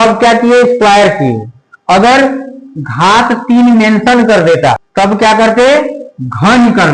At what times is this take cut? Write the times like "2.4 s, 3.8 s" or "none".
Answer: 4.9 s